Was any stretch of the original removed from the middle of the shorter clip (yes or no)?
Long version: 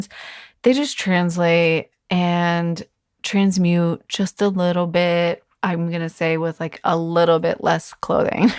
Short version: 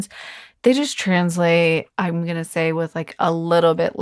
yes